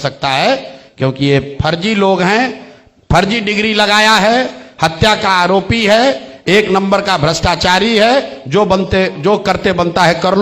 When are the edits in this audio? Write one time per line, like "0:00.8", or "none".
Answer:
none